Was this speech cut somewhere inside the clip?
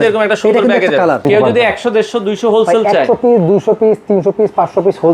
yes; 1 cut; at 1.2 s

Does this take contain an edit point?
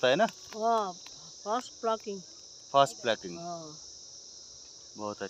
no; 0 cuts

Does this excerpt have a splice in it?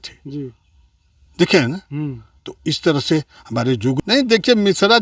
yes; 1 cut; at 4.0 s

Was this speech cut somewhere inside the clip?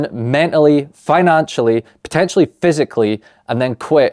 no; 0 cuts

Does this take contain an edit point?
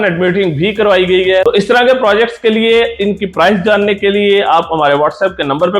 yes; 1 cut; at 1.4 s

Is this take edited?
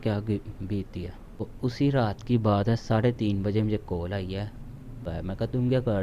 yes; 2 cuts; at 1.4 s, 5.1 s

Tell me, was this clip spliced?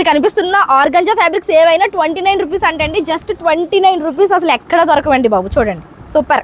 no; 0 cuts

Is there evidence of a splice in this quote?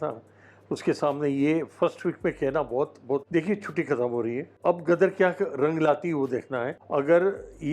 yes; 3 cuts; at 3.2 s, 4.5 s, 6.8 s

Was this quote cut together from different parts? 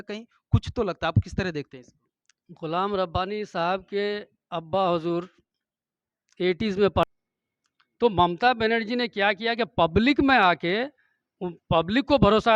yes; 1 cut; at 7.0 s

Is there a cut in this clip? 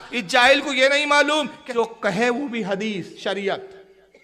yes; 1 cut; at 1.6 s

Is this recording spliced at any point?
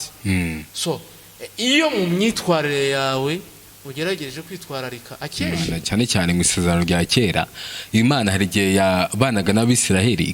yes; 1 cut; at 5.8 s

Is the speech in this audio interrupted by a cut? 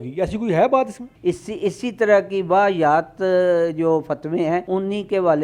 yes; 2 cuts; at 1.1 s, 4.6 s

